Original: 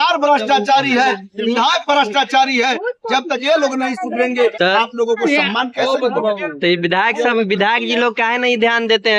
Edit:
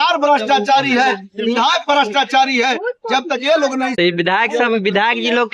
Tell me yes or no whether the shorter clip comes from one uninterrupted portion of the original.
no